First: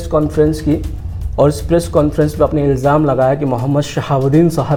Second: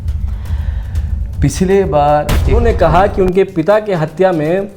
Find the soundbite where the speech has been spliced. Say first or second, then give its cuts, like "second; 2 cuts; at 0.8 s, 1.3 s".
second; 1 cut; at 2.6 s